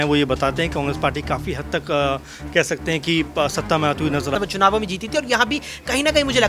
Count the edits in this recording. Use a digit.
1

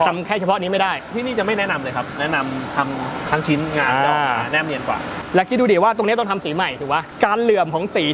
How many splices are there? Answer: 5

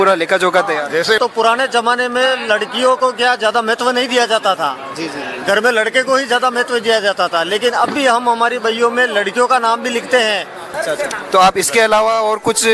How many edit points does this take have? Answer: 2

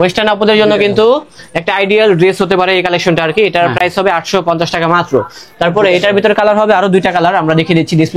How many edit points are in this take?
0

